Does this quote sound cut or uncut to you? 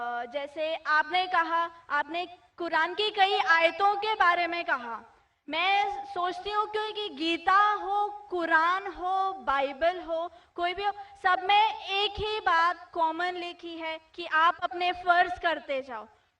cut